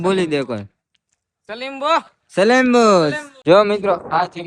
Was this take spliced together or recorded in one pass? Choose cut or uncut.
cut